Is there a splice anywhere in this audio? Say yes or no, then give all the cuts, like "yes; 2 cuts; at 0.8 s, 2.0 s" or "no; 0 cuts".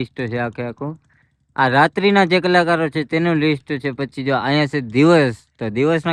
no; 0 cuts